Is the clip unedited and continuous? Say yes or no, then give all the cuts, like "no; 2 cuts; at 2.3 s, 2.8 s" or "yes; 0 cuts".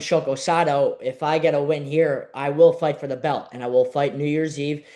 yes; 0 cuts